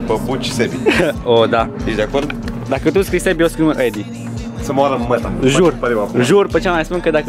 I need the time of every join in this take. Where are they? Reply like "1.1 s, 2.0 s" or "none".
none